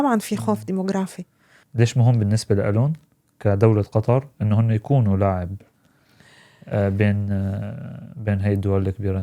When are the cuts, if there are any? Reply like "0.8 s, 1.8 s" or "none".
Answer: 1.6 s

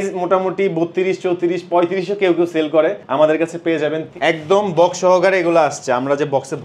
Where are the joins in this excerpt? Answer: 3.0 s, 4.1 s

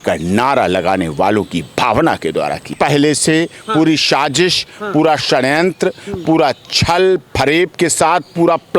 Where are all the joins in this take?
2.7 s

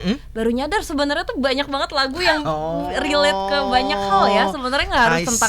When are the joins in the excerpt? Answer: none

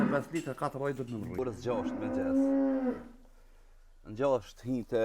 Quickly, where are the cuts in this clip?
1.4 s

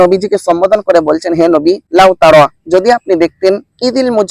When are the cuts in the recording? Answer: 1.8 s

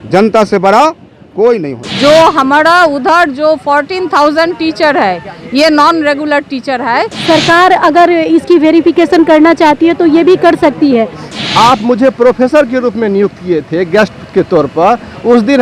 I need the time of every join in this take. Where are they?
1.8 s, 7.1 s, 11.2 s

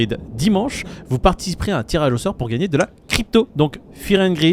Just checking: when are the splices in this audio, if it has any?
3.5 s

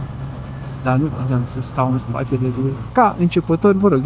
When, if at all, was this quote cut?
2.9 s

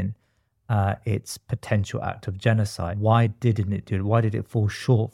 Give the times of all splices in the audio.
2.9 s

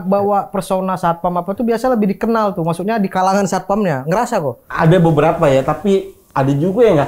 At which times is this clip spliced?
4.6 s

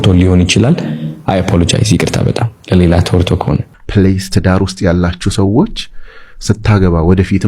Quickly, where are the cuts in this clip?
3.6 s

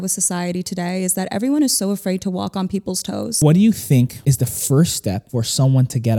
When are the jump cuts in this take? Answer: 3.3 s, 4.2 s, 5.2 s

